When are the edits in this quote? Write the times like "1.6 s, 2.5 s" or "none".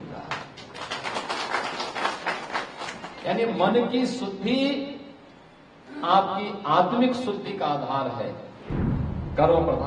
8.7 s